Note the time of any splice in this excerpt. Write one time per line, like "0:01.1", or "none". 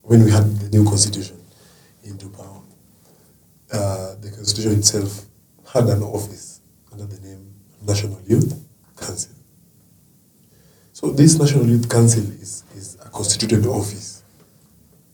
none